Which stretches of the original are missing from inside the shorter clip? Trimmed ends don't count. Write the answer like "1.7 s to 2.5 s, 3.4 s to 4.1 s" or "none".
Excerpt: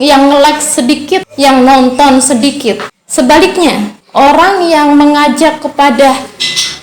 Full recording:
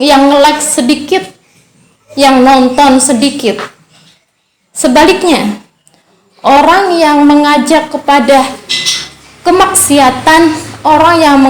1.3 s to 2.1 s, 3.7 s to 4.6 s, 5.6 s to 6.2 s